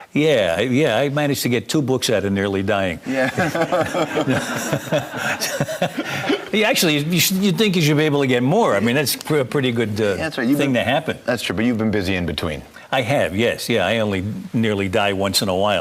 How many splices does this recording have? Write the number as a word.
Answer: one